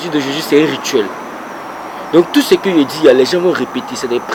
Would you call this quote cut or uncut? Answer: uncut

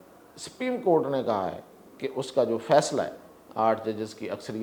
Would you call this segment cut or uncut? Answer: uncut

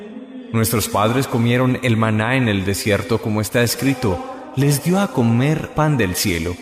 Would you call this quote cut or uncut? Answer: uncut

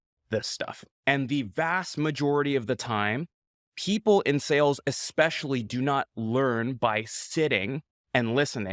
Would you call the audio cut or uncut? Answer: uncut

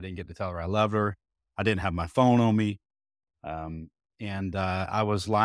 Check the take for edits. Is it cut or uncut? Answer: uncut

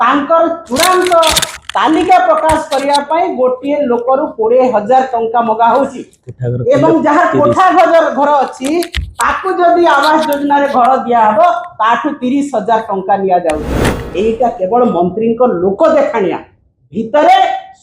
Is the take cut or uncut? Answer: cut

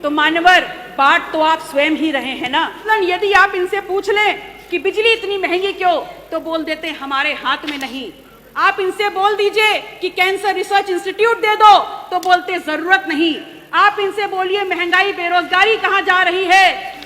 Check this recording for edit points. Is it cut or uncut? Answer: cut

